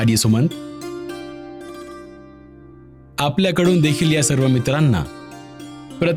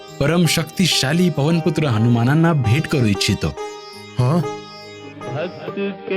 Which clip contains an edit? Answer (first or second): second